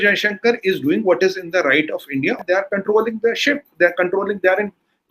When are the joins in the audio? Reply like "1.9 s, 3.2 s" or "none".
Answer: 2.4 s